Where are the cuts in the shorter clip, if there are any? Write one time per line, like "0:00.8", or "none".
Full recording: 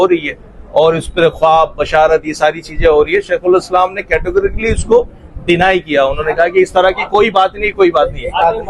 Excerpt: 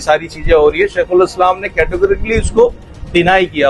none